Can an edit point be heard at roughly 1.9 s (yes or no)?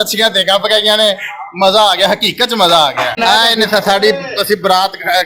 no